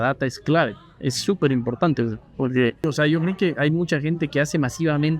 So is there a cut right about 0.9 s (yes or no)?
no